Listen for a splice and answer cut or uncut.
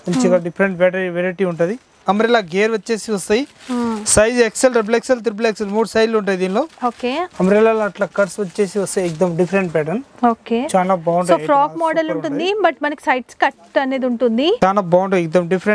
cut